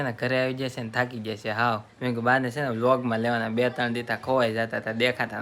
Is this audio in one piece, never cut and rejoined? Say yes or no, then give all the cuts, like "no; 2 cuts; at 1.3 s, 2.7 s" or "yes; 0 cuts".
no; 1 cut; at 1.9 s